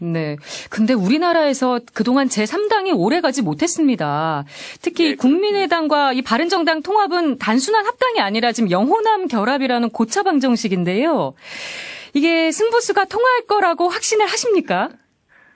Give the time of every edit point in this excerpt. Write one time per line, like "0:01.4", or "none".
none